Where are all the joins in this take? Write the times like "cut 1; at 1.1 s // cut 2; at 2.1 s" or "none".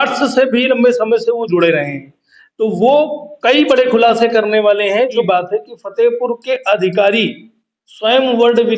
cut 1; at 5.2 s